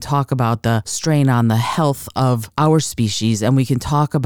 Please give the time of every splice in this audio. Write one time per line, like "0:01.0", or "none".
0:00.9
0:02.5